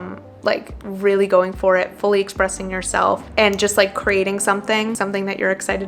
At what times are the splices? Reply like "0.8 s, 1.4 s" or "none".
4.9 s